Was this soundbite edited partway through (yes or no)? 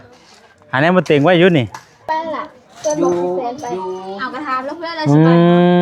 yes